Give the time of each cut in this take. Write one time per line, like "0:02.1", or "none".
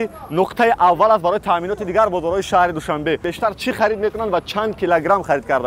0:03.3